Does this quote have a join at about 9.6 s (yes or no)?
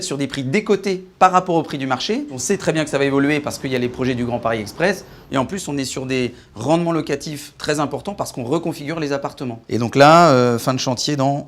yes